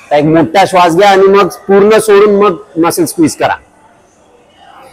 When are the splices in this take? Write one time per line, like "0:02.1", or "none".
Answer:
none